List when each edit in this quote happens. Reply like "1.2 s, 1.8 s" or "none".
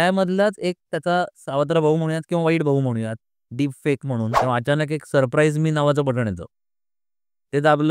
4.3 s